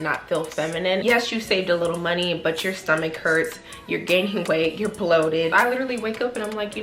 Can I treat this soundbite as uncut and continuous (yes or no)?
no